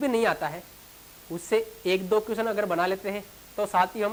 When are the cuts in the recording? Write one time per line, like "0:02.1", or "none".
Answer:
none